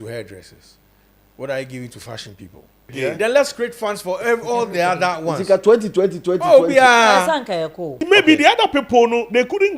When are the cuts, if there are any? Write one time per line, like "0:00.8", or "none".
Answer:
0:02.9
0:08.0